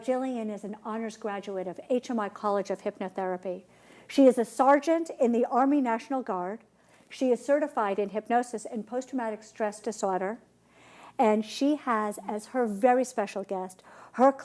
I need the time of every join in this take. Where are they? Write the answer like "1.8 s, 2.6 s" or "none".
12.9 s